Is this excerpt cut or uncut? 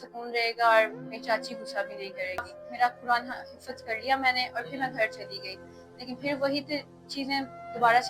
cut